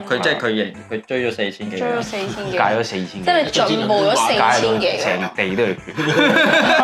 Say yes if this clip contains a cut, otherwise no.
no